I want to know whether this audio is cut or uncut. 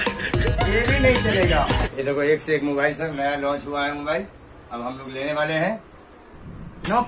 cut